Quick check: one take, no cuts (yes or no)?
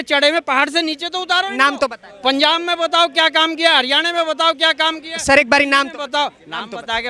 yes